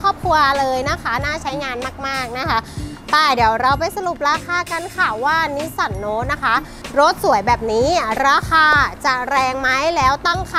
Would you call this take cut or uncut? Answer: uncut